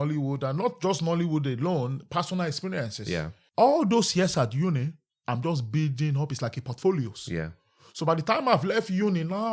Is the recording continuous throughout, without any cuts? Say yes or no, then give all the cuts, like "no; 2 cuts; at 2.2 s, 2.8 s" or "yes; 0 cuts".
no; 1 cut; at 3.4 s